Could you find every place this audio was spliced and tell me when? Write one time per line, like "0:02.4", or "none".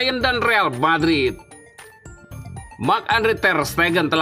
0:01.4
0:02.8

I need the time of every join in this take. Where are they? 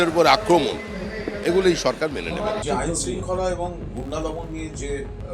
0:02.6

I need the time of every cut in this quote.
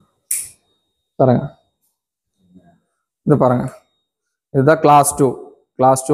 0:02.2

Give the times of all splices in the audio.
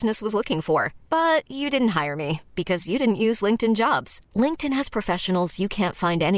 none

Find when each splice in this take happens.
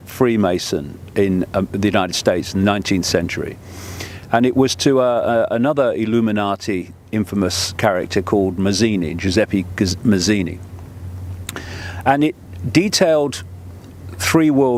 none

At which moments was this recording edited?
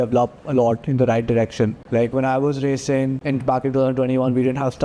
0:01.8
0:03.2

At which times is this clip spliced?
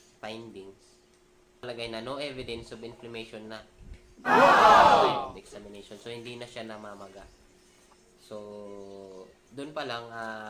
0:01.7

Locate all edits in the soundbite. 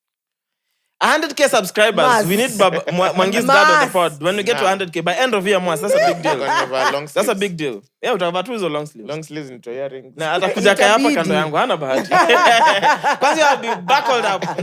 none

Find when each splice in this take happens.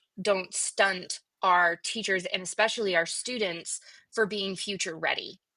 none

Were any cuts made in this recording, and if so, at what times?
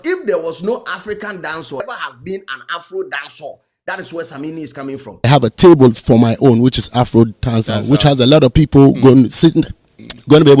0:01.8
0:05.2

